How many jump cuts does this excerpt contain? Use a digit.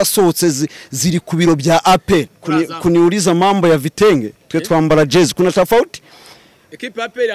1